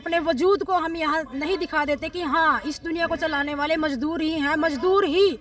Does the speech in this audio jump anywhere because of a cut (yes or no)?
no